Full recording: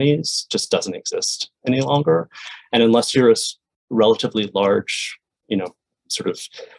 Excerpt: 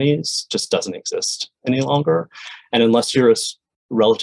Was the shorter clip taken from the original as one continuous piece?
yes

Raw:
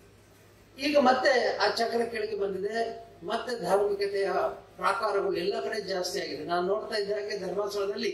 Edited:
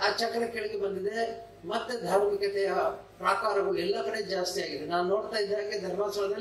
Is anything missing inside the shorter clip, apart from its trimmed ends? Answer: no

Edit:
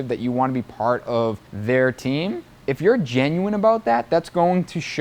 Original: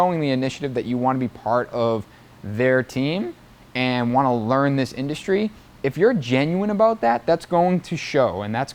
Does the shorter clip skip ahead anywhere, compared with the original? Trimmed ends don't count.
yes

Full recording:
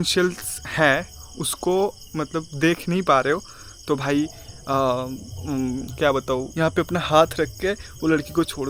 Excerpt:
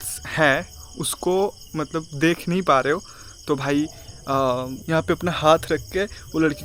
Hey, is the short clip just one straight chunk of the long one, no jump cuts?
no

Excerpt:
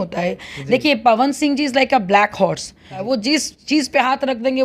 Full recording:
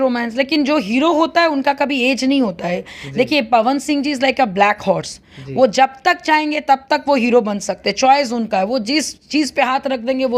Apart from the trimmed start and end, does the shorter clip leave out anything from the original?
yes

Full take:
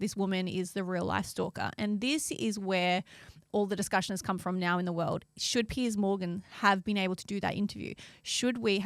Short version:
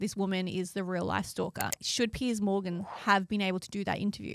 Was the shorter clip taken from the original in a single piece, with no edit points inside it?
no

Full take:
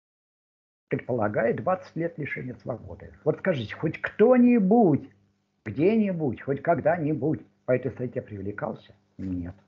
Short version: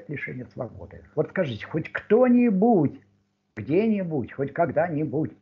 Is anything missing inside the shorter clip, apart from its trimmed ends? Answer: no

